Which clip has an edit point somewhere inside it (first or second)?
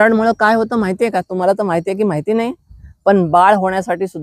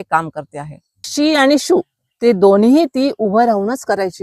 second